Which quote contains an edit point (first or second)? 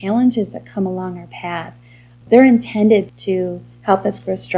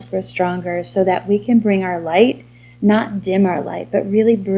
first